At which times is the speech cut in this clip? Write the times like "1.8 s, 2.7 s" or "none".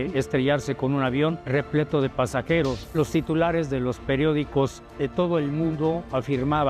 1.4 s, 2.8 s